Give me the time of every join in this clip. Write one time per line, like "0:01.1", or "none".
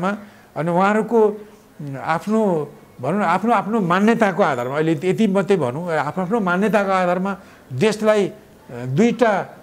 none

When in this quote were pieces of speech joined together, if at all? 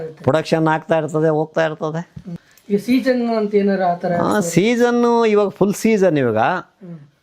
none

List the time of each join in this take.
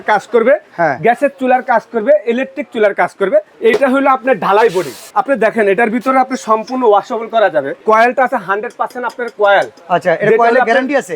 0:03.5
0:05.1
0:07.8

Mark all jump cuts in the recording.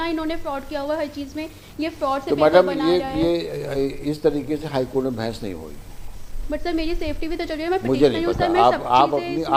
none

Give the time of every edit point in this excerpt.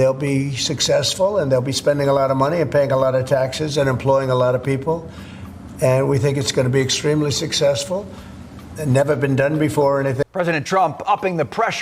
0:10.2

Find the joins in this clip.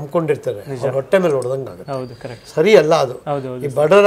0:02.4

